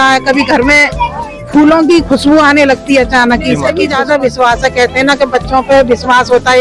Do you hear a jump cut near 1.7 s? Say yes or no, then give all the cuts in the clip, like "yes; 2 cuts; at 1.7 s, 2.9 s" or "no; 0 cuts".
no; 1 cut; at 3.8 s